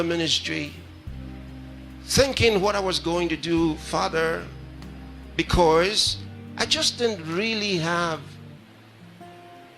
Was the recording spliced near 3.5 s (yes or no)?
no